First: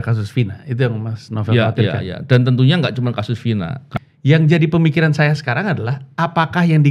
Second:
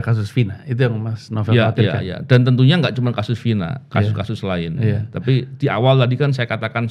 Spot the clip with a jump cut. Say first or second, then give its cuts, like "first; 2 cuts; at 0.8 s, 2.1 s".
first; 1 cut; at 3.9 s